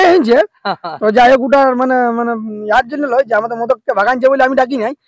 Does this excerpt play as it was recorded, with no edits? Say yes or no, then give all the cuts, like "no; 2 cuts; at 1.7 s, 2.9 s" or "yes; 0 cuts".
yes; 0 cuts